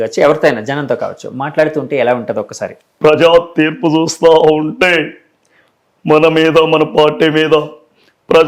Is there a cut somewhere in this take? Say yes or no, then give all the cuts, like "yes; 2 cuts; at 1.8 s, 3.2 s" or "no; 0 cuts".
yes; 1 cut; at 2.6 s